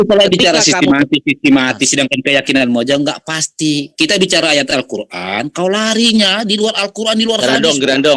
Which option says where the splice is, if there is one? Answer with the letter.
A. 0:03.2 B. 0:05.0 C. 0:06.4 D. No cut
D